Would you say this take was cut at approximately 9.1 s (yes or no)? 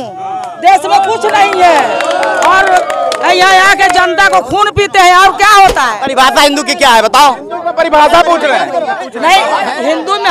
yes